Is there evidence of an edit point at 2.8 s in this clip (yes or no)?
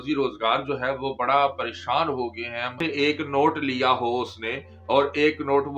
yes